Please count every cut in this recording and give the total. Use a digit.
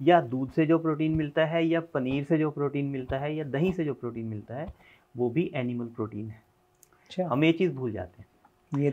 0